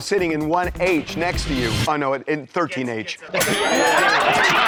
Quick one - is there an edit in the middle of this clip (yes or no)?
no